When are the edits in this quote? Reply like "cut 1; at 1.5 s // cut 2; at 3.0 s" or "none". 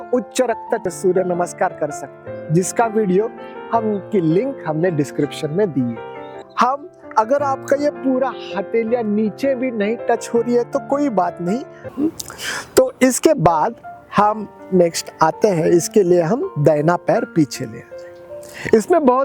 cut 1; at 0.9 s // cut 2; at 6.4 s // cut 3; at 11.8 s